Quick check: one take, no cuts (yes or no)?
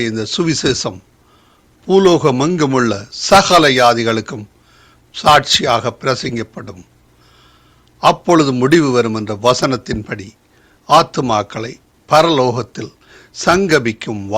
yes